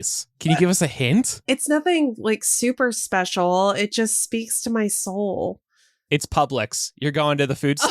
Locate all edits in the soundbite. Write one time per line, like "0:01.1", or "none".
0:01.4